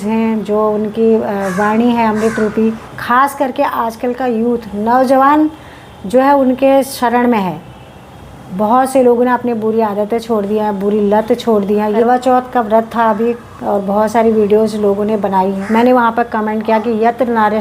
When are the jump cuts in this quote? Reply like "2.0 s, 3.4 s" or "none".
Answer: 2.9 s, 12.0 s, 15.6 s